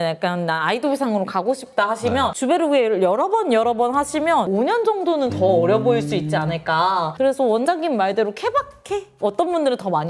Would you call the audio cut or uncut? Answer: uncut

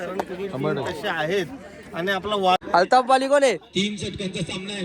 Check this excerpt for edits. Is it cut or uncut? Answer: cut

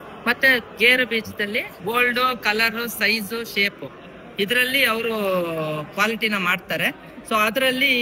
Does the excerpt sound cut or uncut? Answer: cut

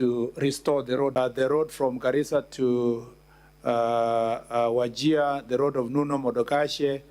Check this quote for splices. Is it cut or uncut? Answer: cut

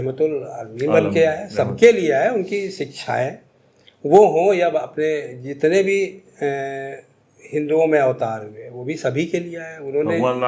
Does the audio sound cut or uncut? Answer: uncut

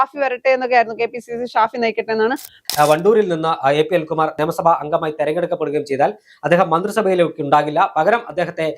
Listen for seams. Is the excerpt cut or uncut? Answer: cut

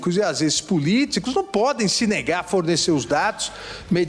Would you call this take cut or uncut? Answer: uncut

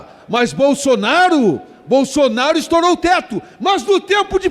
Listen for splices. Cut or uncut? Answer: uncut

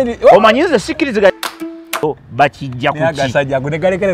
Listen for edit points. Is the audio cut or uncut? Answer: cut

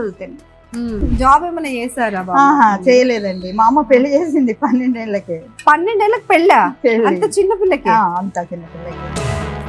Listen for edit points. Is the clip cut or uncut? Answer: cut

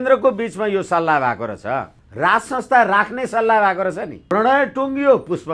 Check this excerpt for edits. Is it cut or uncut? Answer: cut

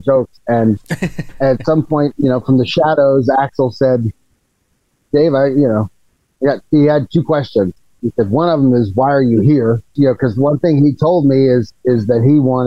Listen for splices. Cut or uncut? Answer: cut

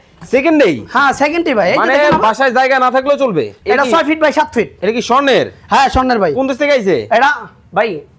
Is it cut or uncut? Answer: cut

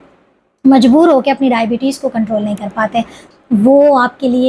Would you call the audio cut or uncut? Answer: cut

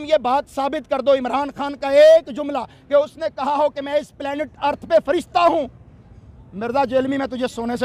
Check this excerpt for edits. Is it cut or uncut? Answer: uncut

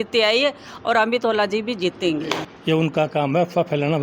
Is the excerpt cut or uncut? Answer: cut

